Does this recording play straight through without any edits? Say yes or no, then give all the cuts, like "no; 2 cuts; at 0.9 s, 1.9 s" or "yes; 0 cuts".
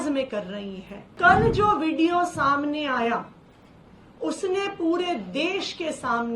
no; 1 cut; at 1.1 s